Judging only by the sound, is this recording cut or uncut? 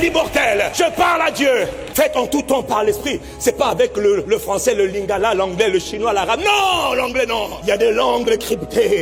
uncut